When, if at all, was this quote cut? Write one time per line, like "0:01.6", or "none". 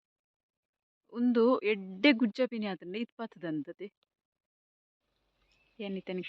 0:04.6